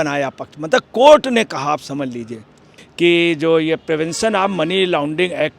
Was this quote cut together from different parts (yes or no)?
yes